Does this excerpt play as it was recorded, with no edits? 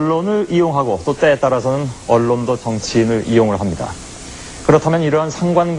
yes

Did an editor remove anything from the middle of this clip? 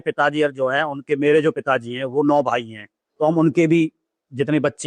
no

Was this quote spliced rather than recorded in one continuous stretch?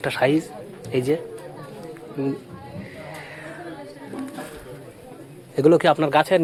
no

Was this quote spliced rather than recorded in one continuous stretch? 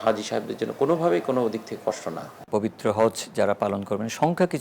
yes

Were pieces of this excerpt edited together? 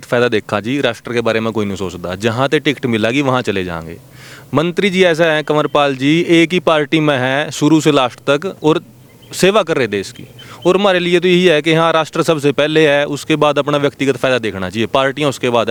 no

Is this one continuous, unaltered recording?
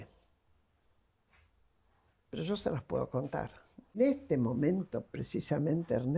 no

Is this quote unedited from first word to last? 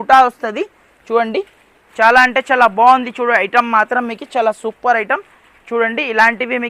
yes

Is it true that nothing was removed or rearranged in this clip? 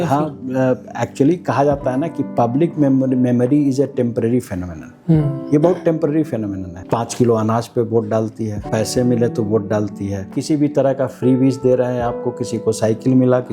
no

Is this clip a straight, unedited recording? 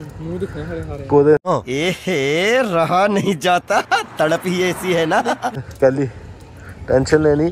yes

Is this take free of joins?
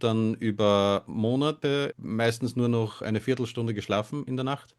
no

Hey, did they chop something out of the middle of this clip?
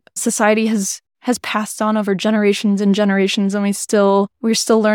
no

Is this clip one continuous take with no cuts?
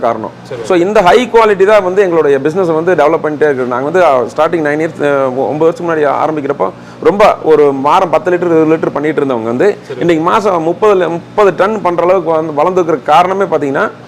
yes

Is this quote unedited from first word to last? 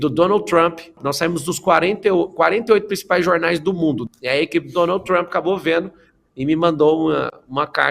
no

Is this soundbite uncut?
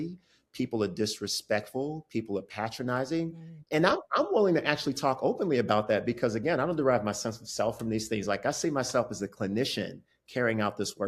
yes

